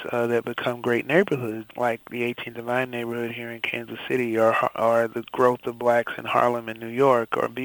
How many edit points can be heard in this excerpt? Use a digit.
1